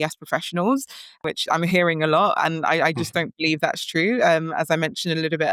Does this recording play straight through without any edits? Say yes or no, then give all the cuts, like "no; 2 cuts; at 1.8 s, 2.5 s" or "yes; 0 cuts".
yes; 0 cuts